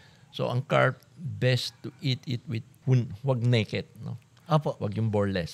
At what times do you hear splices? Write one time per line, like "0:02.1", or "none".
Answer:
0:02.7